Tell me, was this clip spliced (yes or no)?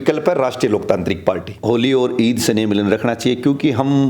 yes